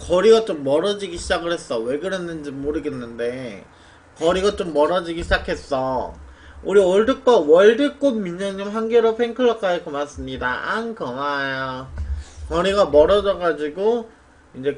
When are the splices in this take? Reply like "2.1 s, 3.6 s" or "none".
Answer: 8.0 s